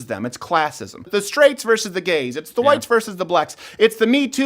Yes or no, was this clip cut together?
yes